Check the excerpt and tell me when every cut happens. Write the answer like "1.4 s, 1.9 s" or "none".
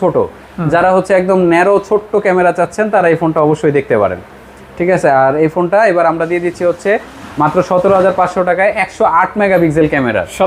none